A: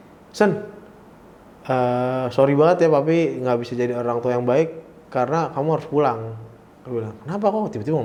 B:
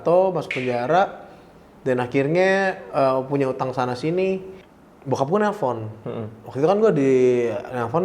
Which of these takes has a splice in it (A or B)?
B